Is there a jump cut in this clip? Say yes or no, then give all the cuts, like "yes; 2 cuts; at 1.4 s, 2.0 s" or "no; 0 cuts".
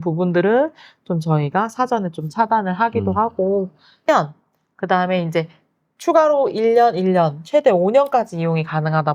yes; 1 cut; at 4.0 s